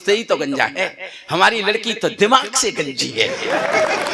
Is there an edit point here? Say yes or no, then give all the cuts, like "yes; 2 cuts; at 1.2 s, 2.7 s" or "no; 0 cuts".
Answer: no; 0 cuts